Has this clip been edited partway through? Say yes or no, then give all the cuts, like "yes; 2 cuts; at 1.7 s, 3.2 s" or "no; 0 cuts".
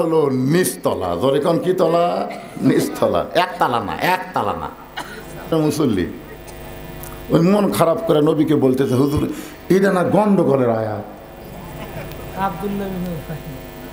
yes; 1 cut; at 5.5 s